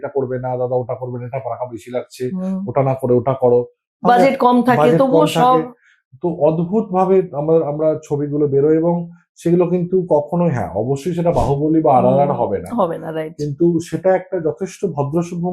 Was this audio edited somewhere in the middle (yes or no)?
no